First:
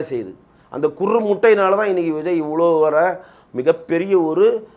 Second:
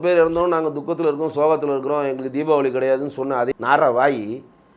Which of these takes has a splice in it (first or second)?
second